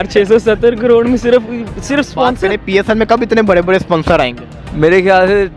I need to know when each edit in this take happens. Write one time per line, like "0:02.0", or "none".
0:02.4